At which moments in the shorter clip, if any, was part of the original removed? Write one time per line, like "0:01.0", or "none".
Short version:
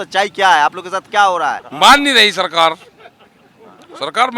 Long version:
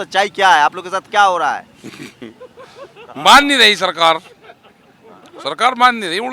0:01.7